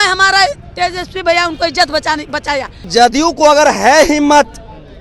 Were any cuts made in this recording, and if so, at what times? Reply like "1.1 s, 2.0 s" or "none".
2.9 s